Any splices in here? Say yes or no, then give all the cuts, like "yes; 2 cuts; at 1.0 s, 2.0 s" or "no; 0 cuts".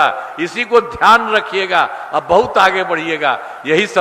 no; 0 cuts